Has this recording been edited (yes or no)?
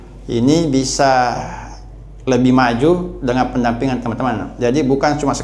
no